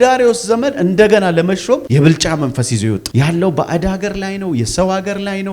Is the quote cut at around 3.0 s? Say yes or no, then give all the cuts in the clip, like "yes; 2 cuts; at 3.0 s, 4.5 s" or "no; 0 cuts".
yes; 1 cut; at 3.0 s